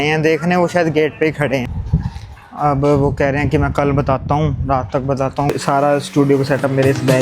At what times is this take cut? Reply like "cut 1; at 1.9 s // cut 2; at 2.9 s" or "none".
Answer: cut 1; at 1.8 s // cut 2; at 5.5 s